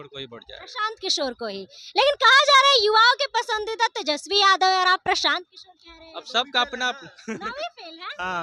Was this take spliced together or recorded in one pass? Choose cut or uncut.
uncut